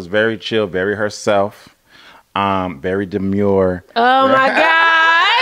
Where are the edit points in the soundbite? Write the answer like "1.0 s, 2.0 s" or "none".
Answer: none